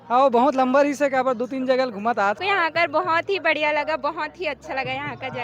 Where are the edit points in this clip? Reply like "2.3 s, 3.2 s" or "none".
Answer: 2.4 s